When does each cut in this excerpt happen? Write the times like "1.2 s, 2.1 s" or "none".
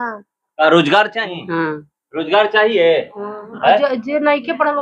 1.3 s